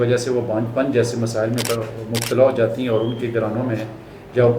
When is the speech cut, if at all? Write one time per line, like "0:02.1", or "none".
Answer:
none